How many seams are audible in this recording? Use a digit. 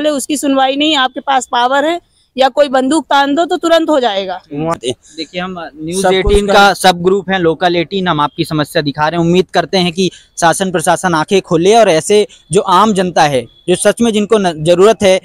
0